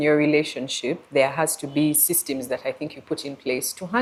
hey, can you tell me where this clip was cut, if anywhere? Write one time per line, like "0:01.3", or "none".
none